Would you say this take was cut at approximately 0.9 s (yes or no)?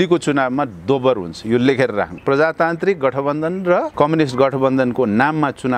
no